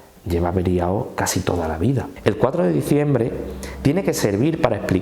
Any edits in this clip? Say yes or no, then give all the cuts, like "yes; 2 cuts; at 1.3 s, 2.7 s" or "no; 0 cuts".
yes; 1 cut; at 2.1 s